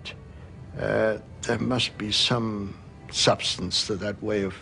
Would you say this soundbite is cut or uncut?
cut